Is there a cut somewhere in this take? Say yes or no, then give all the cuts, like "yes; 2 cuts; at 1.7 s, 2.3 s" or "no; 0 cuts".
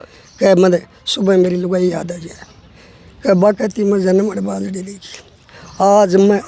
no; 0 cuts